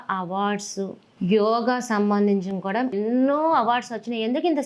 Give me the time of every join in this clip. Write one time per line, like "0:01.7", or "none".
0:01.0
0:02.9